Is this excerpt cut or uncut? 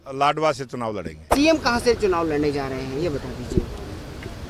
cut